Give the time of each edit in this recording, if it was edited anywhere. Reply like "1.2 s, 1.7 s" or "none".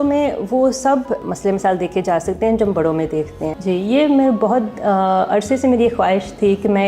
1.2 s, 3.5 s